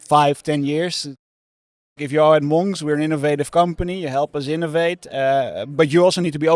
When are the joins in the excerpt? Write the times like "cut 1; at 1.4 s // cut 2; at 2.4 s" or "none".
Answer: cut 1; at 1.6 s